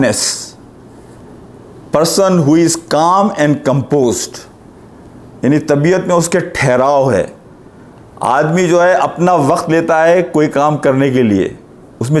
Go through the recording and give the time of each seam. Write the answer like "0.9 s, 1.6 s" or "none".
none